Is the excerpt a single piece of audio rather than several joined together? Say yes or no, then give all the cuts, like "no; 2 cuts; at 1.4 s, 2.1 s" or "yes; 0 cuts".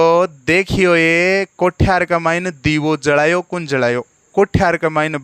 no; 1 cut; at 4.3 s